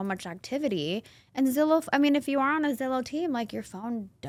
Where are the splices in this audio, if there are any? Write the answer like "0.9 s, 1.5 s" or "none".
none